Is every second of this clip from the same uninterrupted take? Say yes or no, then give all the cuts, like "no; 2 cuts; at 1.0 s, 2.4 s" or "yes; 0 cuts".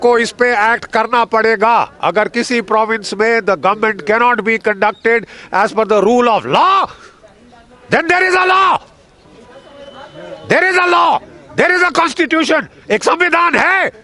yes; 0 cuts